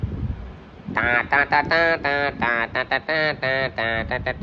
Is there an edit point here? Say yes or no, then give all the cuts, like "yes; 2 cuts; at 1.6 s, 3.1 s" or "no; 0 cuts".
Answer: no; 0 cuts